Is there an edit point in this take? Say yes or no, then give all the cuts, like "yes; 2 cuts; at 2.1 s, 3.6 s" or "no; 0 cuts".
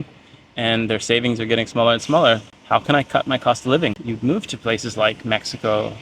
yes; 2 cuts; at 2.4 s, 4.0 s